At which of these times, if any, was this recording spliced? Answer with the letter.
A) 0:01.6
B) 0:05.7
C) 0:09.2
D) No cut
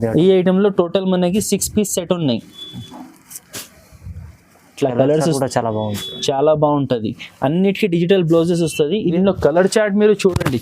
C